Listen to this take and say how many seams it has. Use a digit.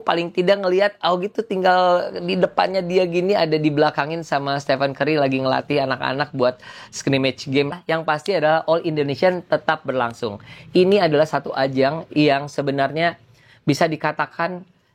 1